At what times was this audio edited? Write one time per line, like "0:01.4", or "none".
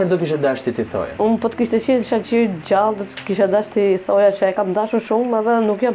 0:01.1